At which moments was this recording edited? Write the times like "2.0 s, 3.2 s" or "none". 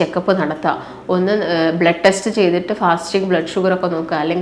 none